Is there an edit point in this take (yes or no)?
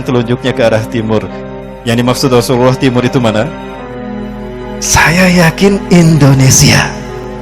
no